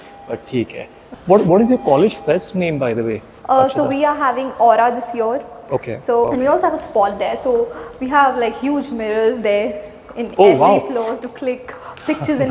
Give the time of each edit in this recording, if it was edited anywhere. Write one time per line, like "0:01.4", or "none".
0:01.1
0:06.2